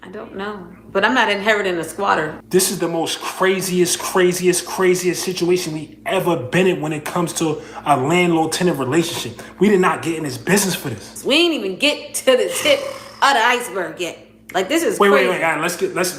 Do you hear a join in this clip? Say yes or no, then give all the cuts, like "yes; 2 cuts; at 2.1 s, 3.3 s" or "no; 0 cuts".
yes; 2 cuts; at 2.3 s, 11.1 s